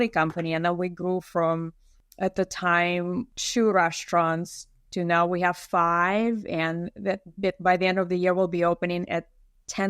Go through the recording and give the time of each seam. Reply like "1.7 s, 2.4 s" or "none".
none